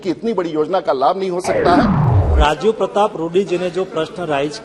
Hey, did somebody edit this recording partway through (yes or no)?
yes